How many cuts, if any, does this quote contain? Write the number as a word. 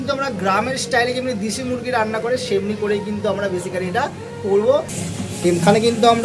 one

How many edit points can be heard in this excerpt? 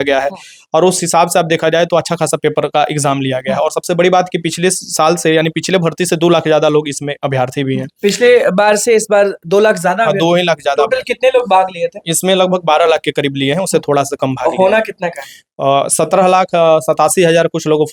zero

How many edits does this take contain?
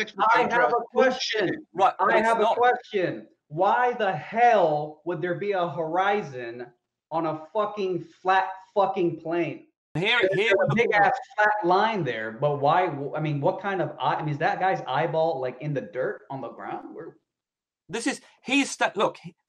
one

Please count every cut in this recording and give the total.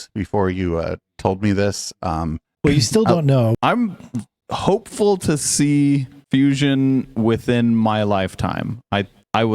one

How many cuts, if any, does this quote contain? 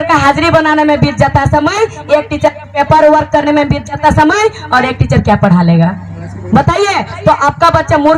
zero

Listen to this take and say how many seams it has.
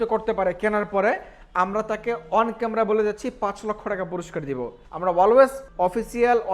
two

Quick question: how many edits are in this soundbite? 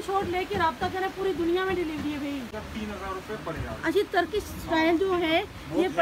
one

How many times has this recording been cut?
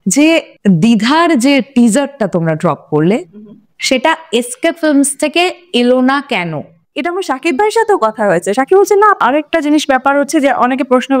two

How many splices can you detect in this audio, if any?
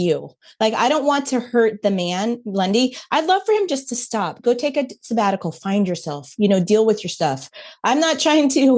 zero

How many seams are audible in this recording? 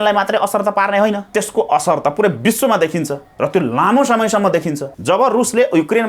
two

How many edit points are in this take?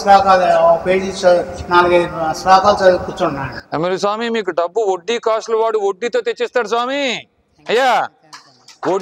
zero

